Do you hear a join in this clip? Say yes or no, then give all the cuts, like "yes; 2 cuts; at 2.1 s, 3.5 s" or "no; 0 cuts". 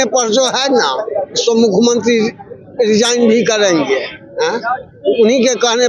no; 0 cuts